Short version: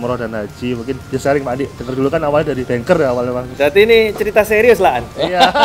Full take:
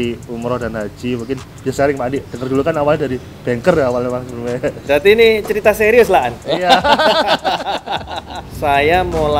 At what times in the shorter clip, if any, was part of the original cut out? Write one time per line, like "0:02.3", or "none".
0:01.0
0:02.6
0:03.5